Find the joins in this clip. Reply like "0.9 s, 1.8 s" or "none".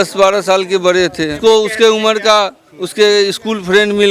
1.4 s